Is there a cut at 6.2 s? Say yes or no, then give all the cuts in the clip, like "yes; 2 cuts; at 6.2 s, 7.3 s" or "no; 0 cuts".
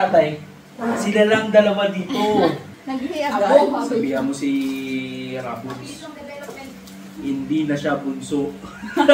no; 1 cut; at 2.7 s